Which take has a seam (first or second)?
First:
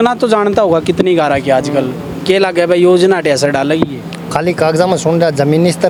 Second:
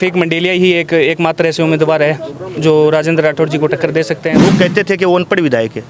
second